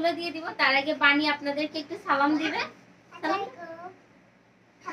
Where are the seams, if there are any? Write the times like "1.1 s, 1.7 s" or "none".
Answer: none